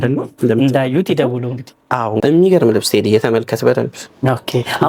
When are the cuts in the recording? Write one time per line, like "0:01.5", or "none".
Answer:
0:02.2